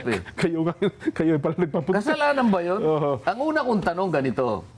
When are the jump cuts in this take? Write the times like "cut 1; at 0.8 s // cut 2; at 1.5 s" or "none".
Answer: none